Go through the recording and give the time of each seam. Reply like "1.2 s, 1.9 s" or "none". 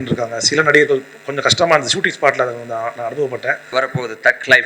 3.7 s